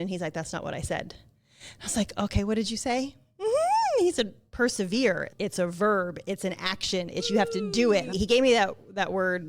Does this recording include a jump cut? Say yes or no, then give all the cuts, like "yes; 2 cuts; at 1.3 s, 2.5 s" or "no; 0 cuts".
yes; 1 cut; at 8.1 s